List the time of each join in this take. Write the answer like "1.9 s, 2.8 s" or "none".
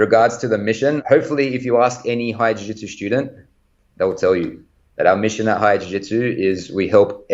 1.0 s